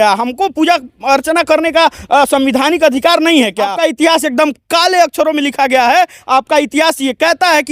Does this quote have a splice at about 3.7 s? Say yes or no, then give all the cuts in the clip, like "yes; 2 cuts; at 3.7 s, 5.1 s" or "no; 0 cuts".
yes; 1 cut; at 3.7 s